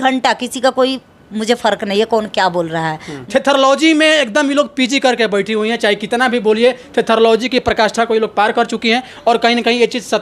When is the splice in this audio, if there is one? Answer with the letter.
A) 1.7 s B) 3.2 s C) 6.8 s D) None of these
B